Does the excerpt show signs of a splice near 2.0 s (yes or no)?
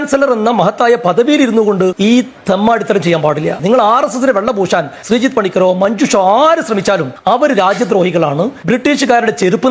yes